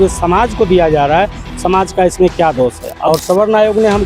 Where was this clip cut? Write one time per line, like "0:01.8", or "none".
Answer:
0:02.9